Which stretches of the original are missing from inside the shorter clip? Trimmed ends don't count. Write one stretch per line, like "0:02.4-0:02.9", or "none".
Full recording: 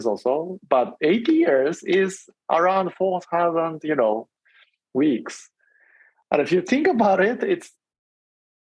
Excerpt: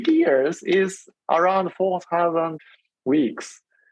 0:03.8-0:04.5